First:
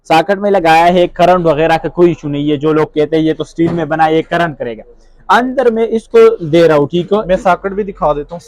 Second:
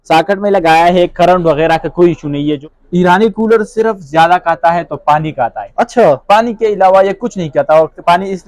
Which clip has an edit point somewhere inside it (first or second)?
second